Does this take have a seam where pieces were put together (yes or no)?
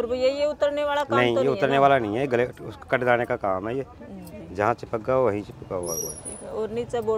no